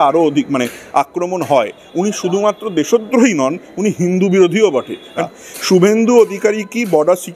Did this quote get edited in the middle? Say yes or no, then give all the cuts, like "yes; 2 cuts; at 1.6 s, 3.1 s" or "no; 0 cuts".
yes; 1 cut; at 5.2 s